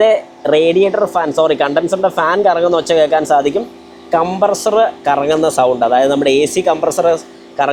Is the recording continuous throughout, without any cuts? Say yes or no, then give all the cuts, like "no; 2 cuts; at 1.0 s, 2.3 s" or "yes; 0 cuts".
yes; 0 cuts